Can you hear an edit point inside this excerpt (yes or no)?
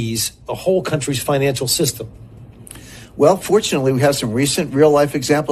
no